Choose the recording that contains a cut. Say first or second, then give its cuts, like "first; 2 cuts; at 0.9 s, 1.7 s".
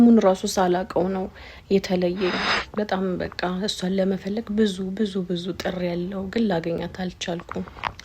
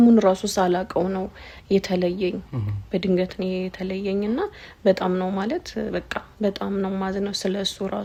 first; 1 cut; at 2.5 s